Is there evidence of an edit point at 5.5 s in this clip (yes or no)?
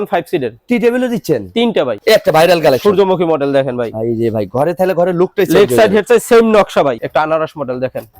no